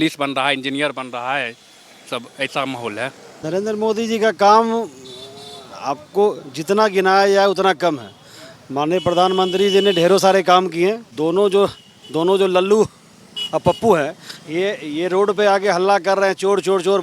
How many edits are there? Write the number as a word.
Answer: two